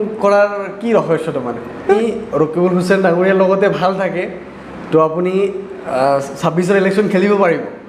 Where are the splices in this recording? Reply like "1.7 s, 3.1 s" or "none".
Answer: 2.0 s